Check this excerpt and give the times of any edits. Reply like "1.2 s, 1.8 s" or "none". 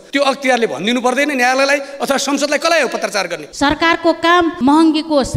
3.4 s, 4.6 s